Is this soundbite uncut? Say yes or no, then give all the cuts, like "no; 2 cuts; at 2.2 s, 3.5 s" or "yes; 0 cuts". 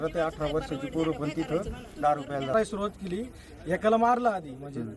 no; 1 cut; at 2.5 s